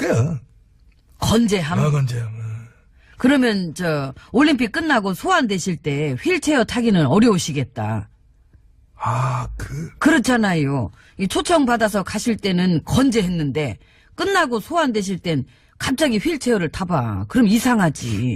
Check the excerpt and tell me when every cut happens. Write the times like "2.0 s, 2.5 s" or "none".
10.5 s